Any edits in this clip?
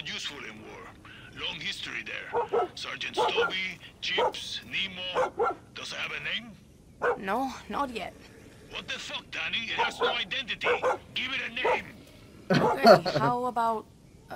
no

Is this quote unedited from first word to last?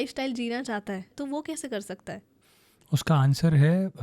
no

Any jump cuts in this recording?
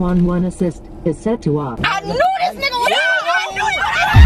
yes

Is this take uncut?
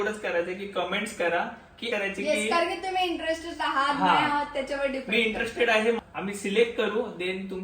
no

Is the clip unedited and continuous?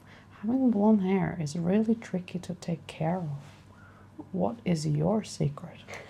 yes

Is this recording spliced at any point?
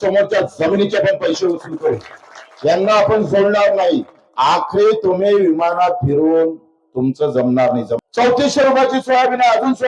yes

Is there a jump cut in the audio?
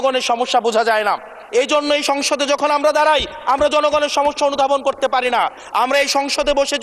no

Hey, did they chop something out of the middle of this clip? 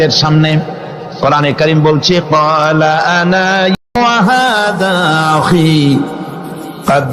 yes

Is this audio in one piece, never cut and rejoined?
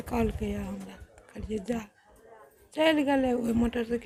yes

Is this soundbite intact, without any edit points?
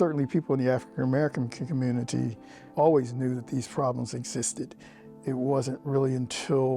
no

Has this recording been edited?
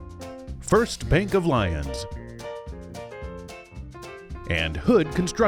yes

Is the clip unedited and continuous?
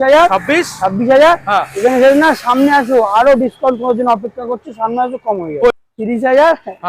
no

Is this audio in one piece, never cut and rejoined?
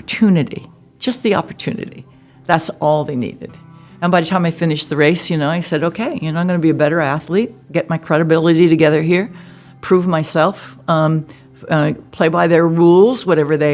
yes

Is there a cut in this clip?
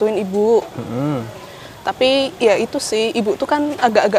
no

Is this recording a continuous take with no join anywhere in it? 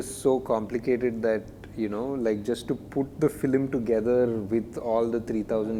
yes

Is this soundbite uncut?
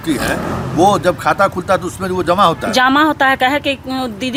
yes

